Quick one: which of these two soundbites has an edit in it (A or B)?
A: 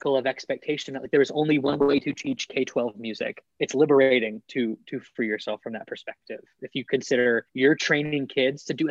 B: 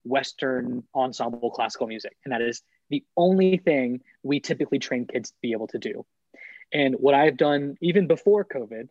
A